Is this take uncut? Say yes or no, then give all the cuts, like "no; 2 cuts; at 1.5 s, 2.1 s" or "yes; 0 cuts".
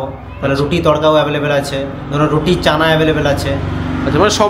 yes; 0 cuts